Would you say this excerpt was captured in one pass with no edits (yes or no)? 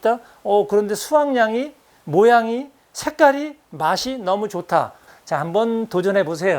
no